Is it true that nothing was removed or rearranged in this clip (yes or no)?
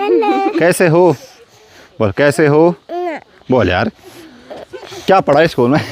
yes